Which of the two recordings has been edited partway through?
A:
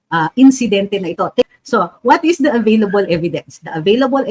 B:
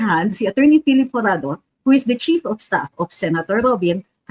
A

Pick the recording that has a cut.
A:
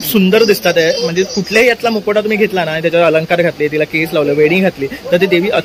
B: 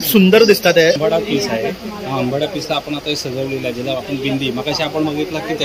B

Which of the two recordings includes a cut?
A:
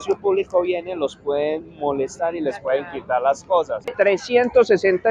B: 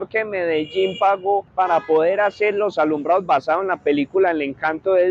A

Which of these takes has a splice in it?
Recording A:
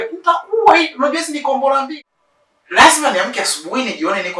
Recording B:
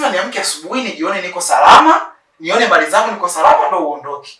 A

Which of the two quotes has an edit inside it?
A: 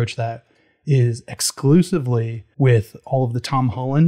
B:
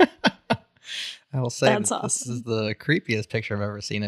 A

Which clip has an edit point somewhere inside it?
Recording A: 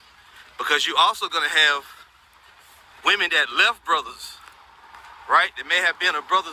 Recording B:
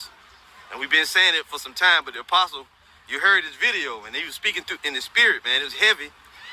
B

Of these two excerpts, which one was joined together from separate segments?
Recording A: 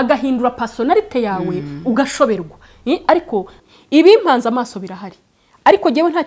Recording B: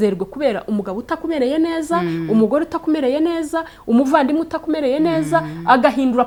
A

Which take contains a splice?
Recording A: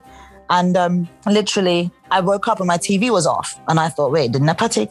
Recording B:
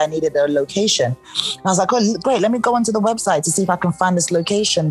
A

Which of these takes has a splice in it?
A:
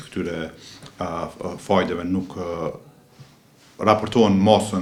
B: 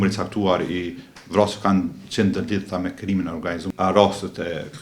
B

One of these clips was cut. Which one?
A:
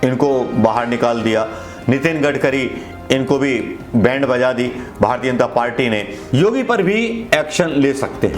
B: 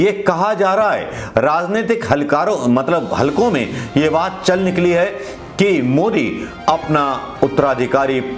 A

